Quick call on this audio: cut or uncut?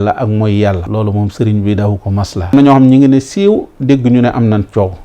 cut